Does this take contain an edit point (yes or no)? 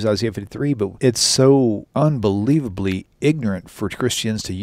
yes